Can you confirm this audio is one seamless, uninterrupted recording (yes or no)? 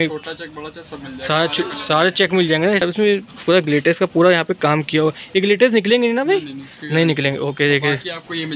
no